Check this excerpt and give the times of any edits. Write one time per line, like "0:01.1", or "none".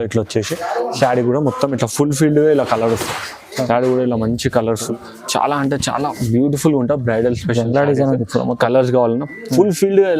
0:04.9